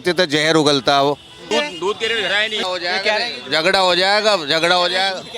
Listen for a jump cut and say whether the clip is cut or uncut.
cut